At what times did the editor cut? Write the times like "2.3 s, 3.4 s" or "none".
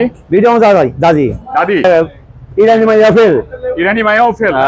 1.8 s